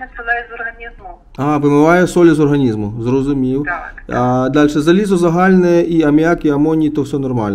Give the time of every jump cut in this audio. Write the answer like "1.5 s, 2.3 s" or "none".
none